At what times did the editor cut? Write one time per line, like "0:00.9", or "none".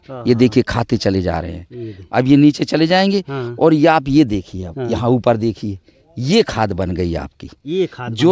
none